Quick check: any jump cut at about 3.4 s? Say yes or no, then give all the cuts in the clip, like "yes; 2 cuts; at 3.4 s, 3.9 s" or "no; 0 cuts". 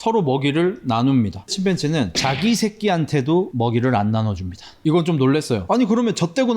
no; 2 cuts; at 1.5 s, 5.6 s